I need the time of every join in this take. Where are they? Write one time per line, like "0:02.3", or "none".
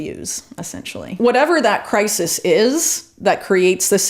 0:01.2